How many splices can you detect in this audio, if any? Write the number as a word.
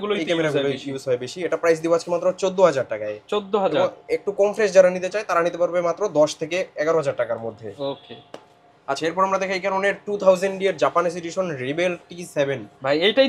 zero